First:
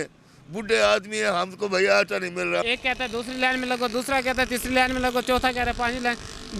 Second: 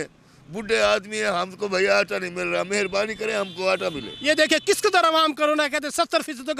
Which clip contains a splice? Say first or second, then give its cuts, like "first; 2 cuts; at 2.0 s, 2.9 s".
first; 1 cut; at 2.7 s